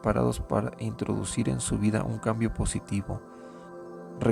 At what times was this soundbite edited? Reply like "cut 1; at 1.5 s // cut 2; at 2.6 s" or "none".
none